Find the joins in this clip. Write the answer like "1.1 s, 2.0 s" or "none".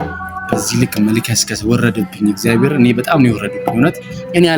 none